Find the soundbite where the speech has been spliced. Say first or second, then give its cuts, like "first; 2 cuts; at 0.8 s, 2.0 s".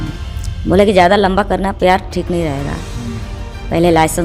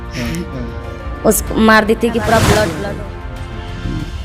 second; 1 cut; at 2.8 s